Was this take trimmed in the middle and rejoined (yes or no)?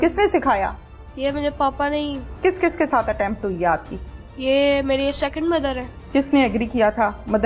yes